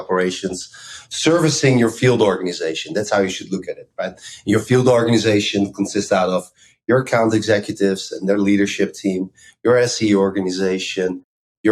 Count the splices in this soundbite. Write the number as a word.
zero